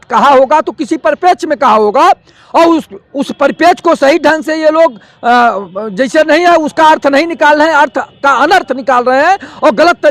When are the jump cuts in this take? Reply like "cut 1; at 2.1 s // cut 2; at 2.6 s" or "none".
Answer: none